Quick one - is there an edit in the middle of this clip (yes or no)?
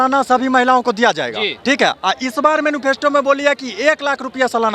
no